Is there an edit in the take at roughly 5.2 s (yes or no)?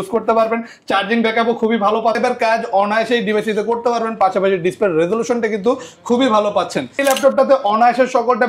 no